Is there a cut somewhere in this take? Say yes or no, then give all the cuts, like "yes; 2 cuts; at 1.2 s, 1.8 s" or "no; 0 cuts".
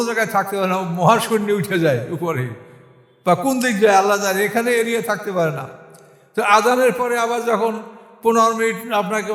no; 0 cuts